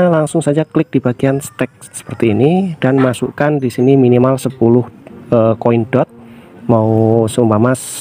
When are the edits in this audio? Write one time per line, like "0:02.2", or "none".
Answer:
none